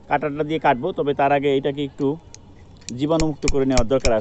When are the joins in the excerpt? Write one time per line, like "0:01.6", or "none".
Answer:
none